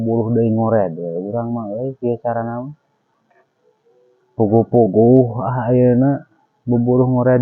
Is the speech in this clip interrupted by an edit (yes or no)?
yes